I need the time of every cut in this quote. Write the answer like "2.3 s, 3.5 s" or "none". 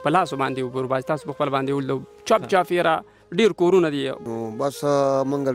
4.2 s